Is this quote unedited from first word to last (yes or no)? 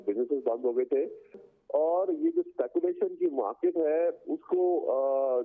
no